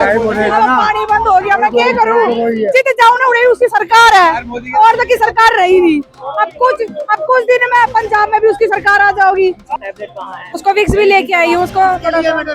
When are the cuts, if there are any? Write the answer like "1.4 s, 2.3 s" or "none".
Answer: 9.8 s